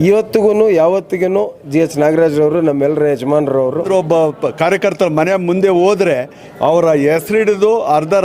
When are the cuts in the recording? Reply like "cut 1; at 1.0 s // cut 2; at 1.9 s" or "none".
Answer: cut 1; at 3.9 s